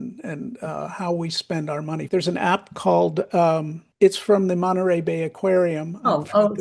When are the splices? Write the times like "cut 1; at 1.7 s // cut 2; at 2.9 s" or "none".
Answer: cut 1; at 2.0 s // cut 2; at 3.8 s